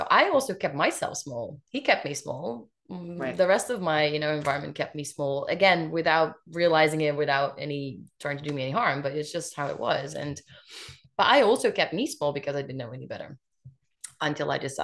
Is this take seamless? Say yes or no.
yes